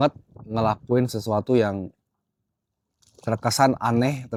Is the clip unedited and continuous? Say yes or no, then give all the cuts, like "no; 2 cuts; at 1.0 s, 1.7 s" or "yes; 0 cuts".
yes; 0 cuts